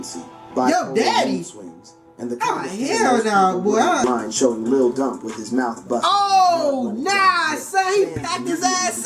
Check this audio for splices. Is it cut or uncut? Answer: cut